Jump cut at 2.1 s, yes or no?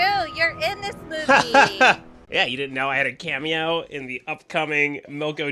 yes